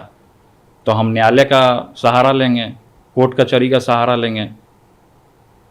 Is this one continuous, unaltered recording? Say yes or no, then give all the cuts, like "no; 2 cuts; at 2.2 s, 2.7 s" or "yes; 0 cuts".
yes; 0 cuts